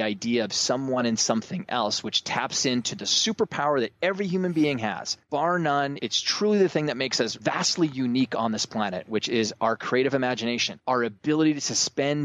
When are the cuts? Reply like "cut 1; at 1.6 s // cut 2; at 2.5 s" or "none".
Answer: cut 1; at 5.1 s // cut 2; at 6.0 s // cut 3; at 7.3 s // cut 4; at 10.7 s